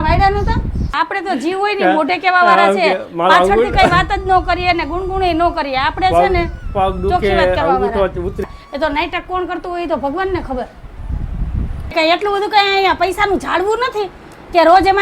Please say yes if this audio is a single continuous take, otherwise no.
no